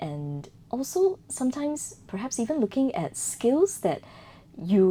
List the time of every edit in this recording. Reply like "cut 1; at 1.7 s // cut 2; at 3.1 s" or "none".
none